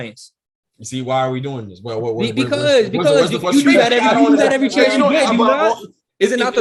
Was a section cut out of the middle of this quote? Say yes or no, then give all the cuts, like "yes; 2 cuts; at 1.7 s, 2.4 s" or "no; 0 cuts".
no; 0 cuts